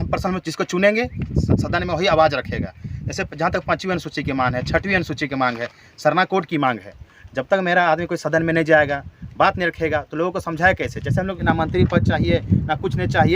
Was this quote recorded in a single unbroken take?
no; 1 cut; at 11.4 s

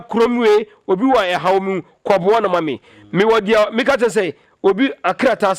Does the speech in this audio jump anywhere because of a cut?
no; 0 cuts

